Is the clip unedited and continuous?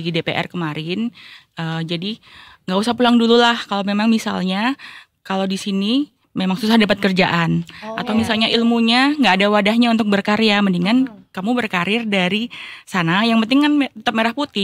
yes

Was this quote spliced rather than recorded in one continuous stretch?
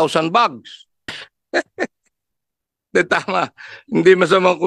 yes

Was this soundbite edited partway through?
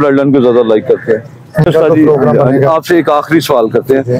yes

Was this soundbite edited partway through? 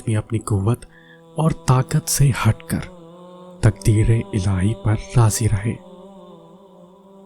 yes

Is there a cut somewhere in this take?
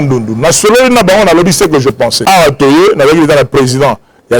yes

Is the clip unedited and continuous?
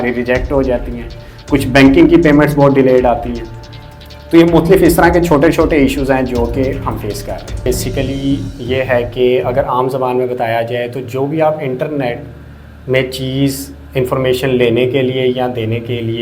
no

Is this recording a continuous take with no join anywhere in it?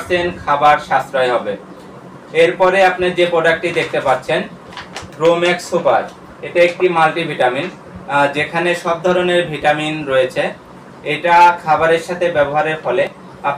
yes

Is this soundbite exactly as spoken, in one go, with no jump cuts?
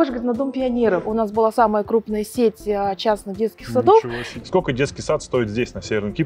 no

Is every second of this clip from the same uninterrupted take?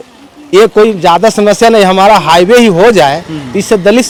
yes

